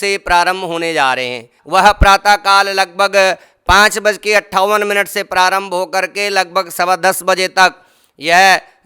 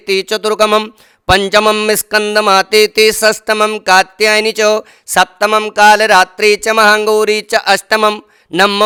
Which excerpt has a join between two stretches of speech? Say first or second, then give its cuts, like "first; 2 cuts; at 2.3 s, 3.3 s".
first; 1 cut; at 1.6 s